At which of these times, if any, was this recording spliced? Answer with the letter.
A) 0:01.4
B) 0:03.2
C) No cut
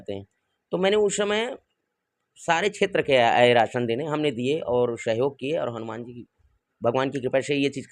C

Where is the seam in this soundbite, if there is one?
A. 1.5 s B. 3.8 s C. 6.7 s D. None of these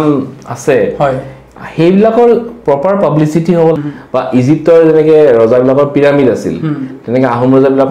B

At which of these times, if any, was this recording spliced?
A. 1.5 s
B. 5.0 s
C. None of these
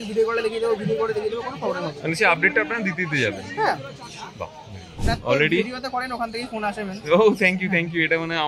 B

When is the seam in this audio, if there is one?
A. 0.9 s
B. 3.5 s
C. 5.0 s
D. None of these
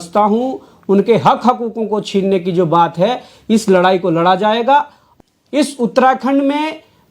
C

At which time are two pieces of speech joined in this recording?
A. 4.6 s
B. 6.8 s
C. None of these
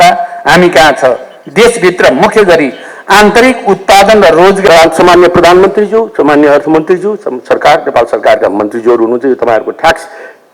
A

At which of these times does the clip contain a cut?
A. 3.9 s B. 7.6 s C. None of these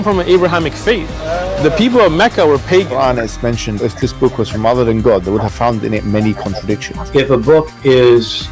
A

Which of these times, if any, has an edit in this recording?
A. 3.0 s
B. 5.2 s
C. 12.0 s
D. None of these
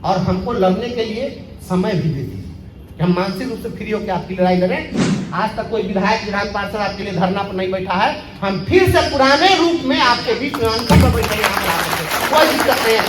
B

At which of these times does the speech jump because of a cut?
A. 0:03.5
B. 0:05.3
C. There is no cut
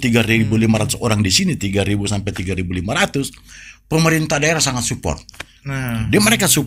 C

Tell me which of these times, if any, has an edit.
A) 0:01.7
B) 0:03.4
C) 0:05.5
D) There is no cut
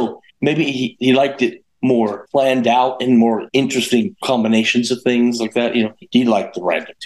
B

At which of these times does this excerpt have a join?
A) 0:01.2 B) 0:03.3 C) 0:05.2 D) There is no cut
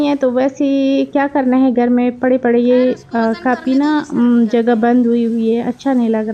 D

